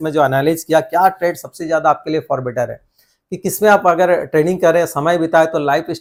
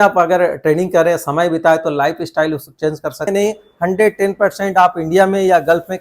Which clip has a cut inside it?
second; 1 cut; at 3.3 s

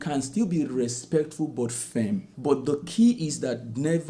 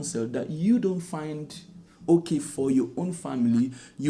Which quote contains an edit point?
first; 1 cut; at 2.3 s

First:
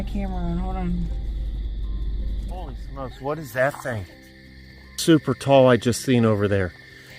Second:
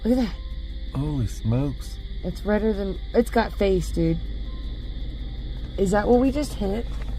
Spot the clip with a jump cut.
first; 1 cut; at 2.5 s

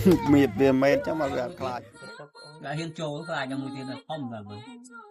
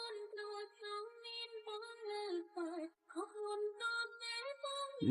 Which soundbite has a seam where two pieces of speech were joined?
first; 1 cut; at 1.5 s

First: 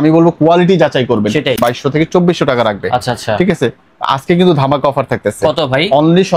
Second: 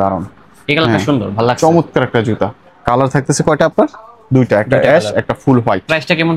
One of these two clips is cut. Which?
first; 1 cut; at 1.6 s

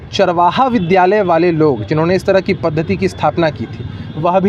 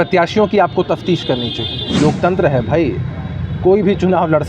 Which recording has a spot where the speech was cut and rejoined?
second; 1 cut; at 1.8 s

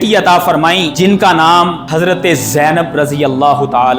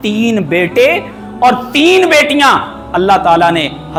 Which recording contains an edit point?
first; 2 cuts; at 0.9 s, 1.8 s

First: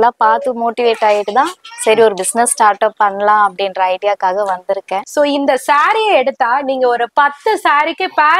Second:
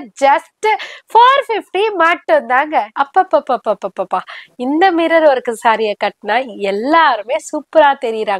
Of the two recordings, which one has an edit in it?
first; 1 cut; at 5.0 s

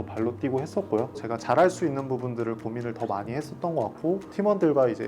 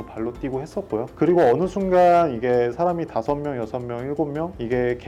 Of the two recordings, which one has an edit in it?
first; 2 cuts; at 1.1 s, 4.2 s

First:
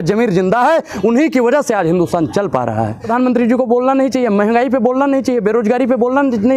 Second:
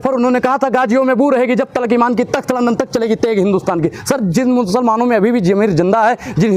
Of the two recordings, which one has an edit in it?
first; 1 cut; at 3.0 s

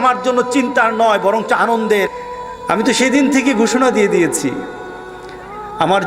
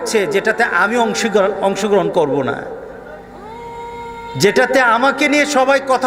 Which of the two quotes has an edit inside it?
first; 1 cut; at 2.1 s

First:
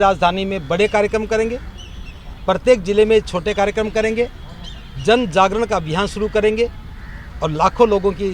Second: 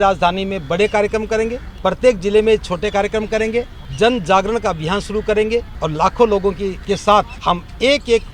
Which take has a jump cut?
second; 5 cuts; at 1.7 s, 3.8 s, 5.7 s, 6.8 s, 7.3 s

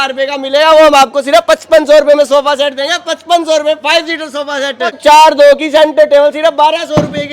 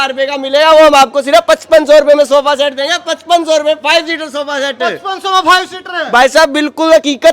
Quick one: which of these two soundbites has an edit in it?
first; 1 cut; at 5.0 s

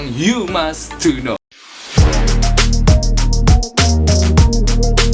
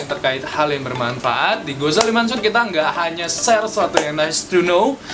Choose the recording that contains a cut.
first; 1 cut; at 1.5 s

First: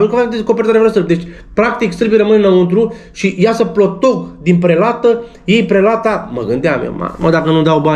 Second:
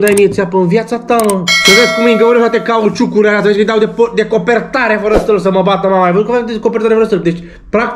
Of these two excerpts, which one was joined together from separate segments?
second; 1 cut; at 1.5 s

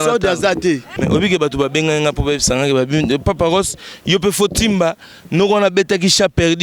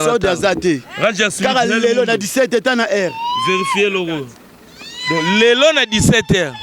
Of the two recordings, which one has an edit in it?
first; 1 cut; at 0.9 s

